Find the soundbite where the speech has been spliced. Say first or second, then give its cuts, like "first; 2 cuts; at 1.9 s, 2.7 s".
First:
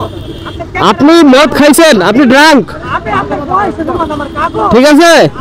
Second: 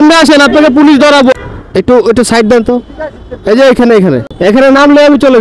second; 2 cuts; at 1.3 s, 4.3 s